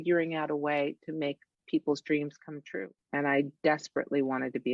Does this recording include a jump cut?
yes; 1 cut; at 2.7 s

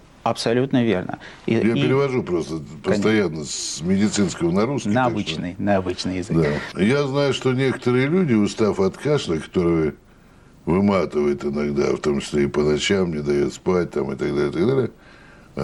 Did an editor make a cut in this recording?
no; 0 cuts

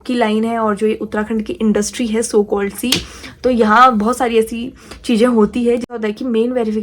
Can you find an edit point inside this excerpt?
yes; 1 cut; at 5.9 s

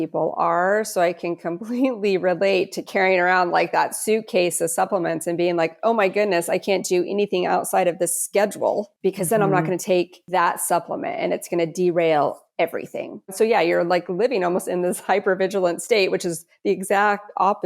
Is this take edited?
yes; 3 cuts; at 9.0 s, 10.2 s, 13.3 s

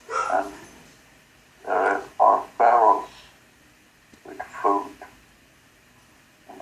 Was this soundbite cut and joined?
yes; 1 cut; at 1.6 s

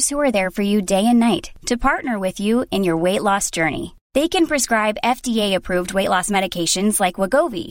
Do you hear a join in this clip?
no; 0 cuts

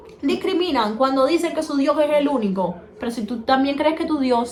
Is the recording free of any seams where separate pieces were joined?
yes; 0 cuts

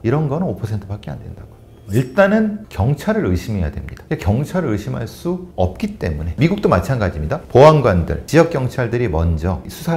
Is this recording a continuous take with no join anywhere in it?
yes; 0 cuts

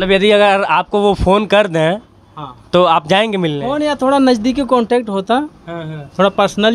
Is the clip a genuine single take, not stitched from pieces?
yes; 0 cuts

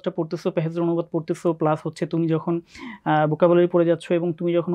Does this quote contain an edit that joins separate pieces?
no; 0 cuts

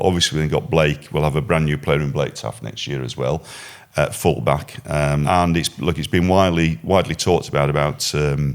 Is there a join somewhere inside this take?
yes; 1 cut; at 5.2 s

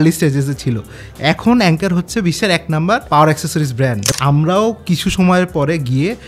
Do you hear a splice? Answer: yes; 2 cuts; at 3.0 s, 4.0 s

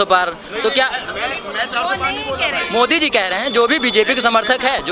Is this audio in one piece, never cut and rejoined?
yes; 0 cuts

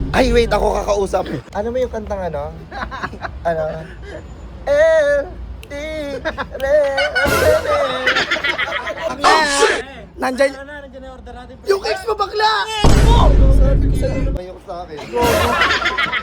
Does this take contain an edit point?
yes; 3 cuts; at 1.5 s, 9.1 s, 14.4 s

